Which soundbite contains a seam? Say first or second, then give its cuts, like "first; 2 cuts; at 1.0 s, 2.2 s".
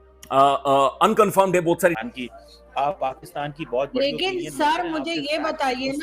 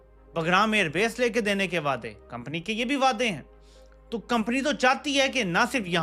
first; 1 cut; at 2.0 s